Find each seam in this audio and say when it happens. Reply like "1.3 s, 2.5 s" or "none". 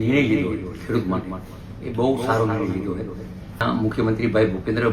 3.6 s